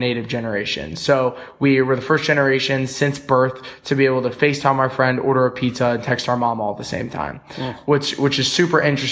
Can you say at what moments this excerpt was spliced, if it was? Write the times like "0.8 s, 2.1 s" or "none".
none